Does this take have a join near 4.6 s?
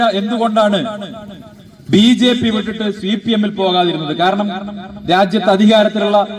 no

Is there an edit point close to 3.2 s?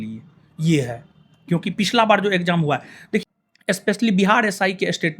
yes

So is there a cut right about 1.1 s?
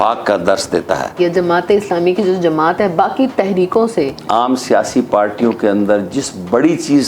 yes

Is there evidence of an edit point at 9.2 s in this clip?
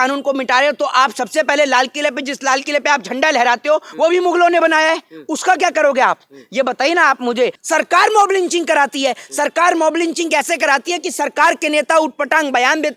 no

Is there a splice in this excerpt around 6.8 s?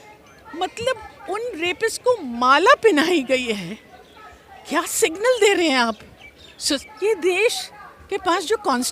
yes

